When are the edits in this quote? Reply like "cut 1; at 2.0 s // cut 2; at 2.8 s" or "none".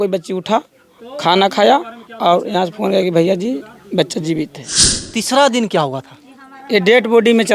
cut 1; at 5.1 s